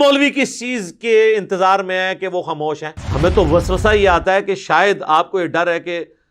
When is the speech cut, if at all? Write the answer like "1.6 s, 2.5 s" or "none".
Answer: 3.0 s